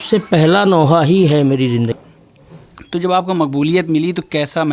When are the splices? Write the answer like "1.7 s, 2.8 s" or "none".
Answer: 2.0 s